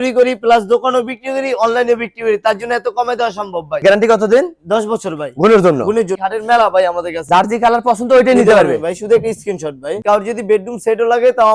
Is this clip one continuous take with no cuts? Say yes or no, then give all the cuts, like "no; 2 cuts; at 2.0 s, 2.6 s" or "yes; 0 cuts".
no; 4 cuts; at 3.8 s, 6.2 s, 7.2 s, 9.8 s